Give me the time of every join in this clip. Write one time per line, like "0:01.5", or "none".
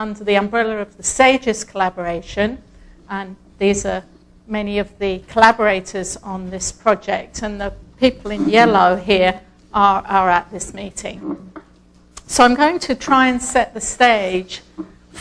0:13.0